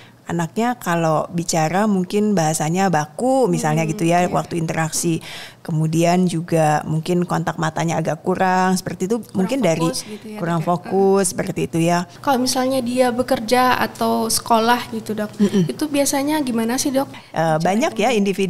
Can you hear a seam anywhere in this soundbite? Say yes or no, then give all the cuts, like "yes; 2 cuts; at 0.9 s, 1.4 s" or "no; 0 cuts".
yes; 2 cuts; at 12.1 s, 17.2 s